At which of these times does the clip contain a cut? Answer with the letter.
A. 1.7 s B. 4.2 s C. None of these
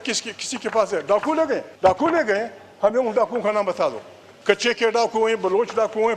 A